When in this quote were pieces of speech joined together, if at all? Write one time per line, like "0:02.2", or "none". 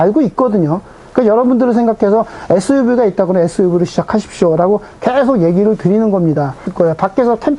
0:06.7